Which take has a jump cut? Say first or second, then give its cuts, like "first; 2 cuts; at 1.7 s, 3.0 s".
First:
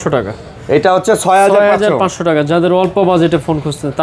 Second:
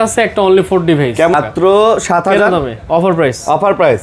second; 1 cut; at 1.3 s